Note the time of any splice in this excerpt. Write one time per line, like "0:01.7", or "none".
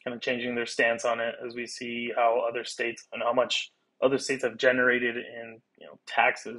none